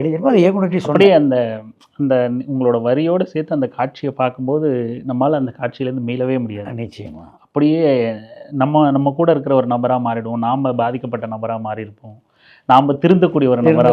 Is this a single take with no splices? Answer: yes; 0 cuts

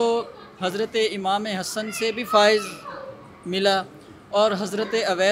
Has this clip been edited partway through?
no; 0 cuts

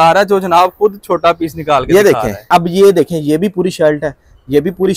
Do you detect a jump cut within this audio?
yes; 1 cut; at 2.5 s

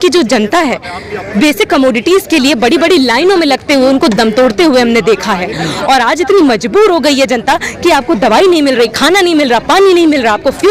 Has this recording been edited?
no; 0 cuts

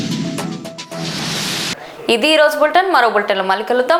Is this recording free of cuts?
yes; 0 cuts

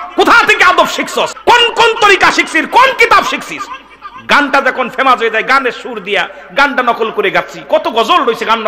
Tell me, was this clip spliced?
yes; 1 cut; at 1.3 s

